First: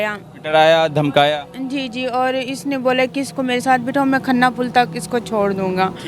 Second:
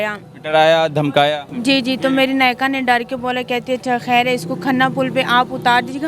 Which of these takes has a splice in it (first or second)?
second